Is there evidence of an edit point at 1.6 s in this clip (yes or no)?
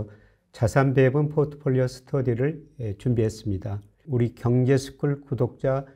no